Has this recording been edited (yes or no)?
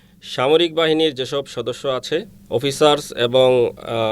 yes